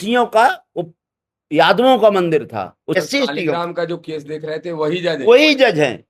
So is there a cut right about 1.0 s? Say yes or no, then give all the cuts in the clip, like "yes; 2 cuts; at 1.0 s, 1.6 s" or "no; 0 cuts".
no; 1 cut; at 3.0 s